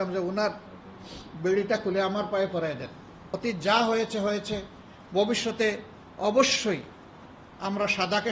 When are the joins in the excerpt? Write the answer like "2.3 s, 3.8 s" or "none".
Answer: 3.2 s